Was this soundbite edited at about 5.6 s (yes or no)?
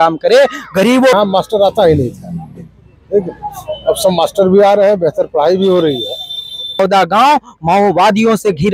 no